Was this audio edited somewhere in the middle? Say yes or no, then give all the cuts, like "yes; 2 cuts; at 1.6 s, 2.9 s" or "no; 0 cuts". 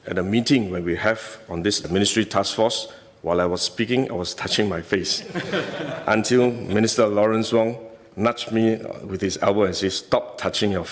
no; 0 cuts